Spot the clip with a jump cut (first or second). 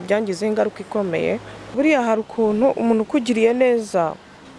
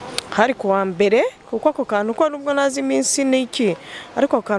first